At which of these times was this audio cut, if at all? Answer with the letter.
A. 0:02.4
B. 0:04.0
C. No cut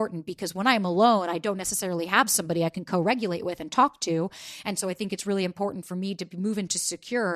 C